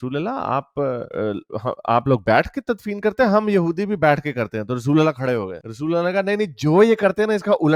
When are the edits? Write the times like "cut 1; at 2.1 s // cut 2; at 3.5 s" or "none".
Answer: none